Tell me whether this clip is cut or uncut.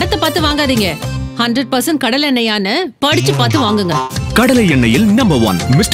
uncut